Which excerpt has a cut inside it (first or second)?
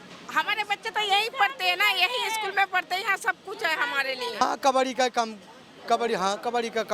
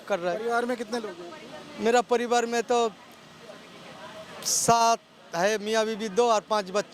first